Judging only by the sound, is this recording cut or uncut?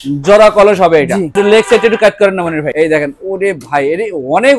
cut